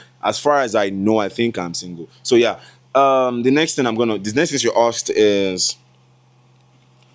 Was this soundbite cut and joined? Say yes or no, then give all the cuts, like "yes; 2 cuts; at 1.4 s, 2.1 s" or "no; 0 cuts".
no; 0 cuts